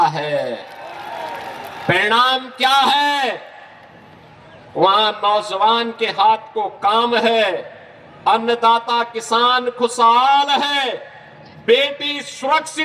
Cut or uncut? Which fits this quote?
uncut